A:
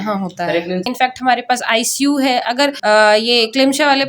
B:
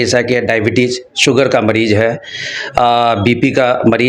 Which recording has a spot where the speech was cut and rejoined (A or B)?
A